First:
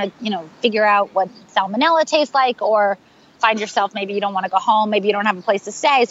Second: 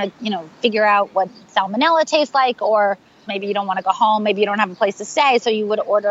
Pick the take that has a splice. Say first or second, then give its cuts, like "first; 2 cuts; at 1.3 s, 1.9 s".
second; 1 cut; at 3.3 s